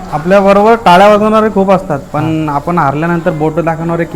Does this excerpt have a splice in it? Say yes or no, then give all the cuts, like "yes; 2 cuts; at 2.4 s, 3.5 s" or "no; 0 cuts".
no; 0 cuts